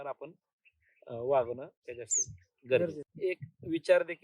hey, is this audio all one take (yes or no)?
no